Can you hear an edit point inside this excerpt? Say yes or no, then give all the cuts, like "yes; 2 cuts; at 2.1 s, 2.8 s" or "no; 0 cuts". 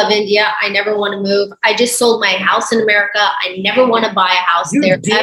no; 0 cuts